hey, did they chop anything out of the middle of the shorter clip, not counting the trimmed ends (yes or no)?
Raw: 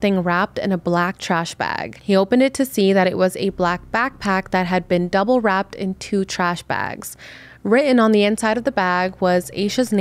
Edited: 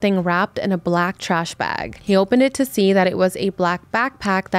no